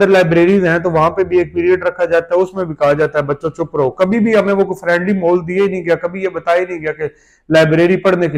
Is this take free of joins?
yes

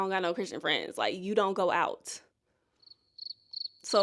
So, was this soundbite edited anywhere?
no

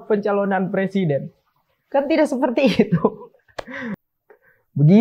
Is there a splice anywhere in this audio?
yes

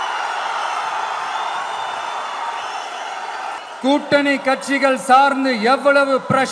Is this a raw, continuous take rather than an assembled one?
no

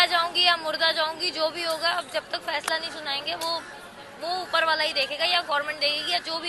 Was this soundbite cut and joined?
no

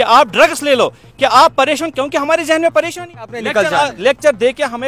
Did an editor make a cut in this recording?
yes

